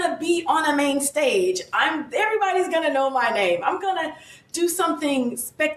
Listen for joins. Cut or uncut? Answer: uncut